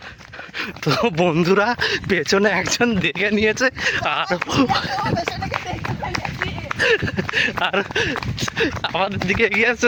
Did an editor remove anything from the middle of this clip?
no; 0 cuts

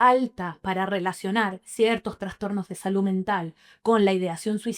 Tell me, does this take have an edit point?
no; 0 cuts

